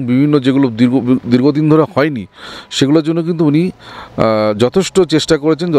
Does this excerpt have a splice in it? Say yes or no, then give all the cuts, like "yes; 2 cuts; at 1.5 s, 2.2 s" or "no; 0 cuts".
no; 0 cuts